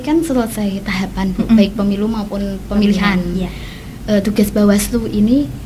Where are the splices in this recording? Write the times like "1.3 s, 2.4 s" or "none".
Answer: none